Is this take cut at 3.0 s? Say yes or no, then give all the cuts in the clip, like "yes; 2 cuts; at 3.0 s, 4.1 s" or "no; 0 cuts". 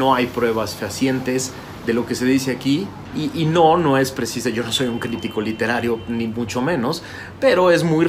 yes; 1 cut; at 3.0 s